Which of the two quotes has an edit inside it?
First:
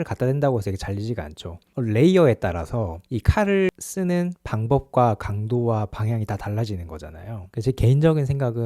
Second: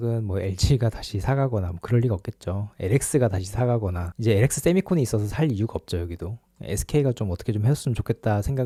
first; 2 cuts; at 1.7 s, 7.4 s

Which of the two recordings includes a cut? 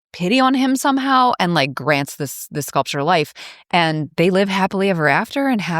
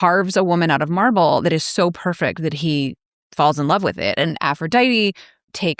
first; 1 cut; at 4.1 s

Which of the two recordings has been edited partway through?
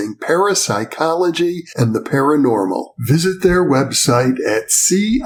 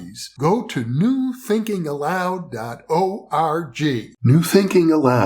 second; 1 cut; at 4.1 s

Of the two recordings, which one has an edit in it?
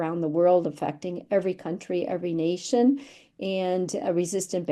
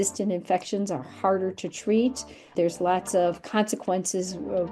second; 1 cut; at 2.5 s

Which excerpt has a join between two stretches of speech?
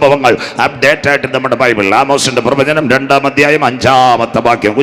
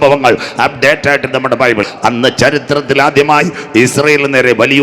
second; 1 cut; at 1.8 s

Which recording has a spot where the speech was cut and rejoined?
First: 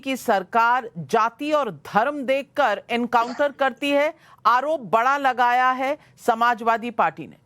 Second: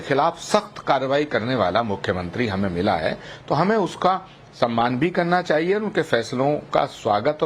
second; 1 cut; at 1.1 s

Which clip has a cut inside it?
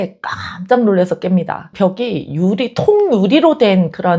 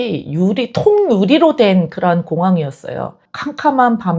second; 1 cut; at 3.2 s

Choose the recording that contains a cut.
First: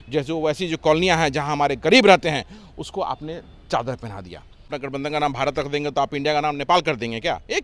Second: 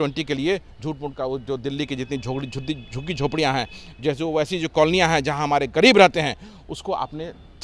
first; 1 cut; at 4.6 s

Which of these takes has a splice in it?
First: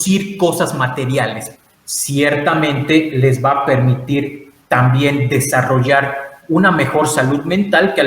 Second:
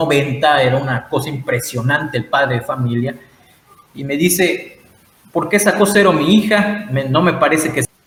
first; 1 cut; at 1.4 s

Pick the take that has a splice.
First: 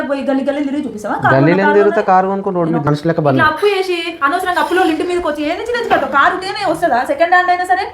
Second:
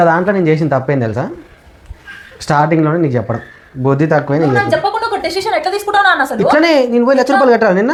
first; 1 cut; at 2.9 s

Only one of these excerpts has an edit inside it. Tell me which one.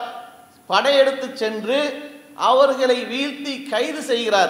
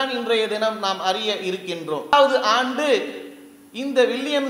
second; 1 cut; at 2.1 s

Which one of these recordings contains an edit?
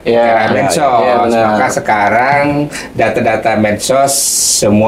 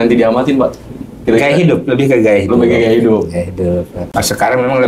second; 1 cut; at 4.0 s

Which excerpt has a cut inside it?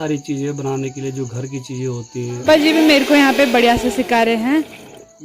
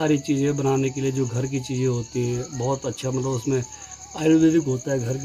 first; 1 cut; at 2.4 s

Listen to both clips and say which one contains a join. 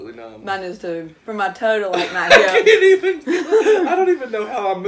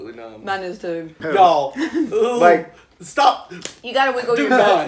second; 1 cut; at 1.2 s

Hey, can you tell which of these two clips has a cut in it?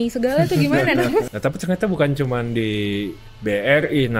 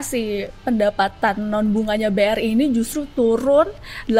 first; 1 cut; at 1.2 s

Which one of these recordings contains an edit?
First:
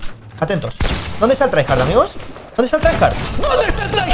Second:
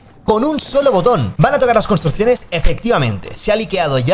second; 1 cut; at 1.3 s

